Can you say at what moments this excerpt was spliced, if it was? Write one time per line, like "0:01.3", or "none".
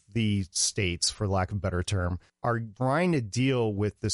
0:02.5

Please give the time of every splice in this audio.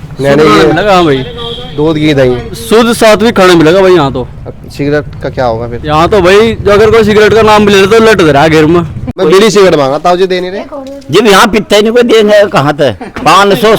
0:09.1

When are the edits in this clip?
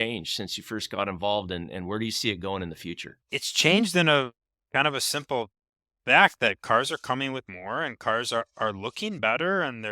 0:03.1

